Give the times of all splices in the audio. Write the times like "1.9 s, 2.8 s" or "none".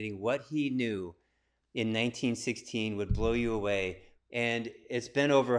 4.1 s